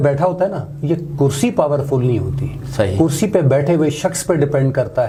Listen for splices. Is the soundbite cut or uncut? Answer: uncut